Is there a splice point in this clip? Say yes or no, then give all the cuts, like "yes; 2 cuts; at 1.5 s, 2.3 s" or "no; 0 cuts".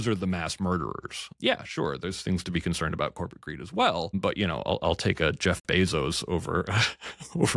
yes; 2 cuts; at 1.3 s, 4.1 s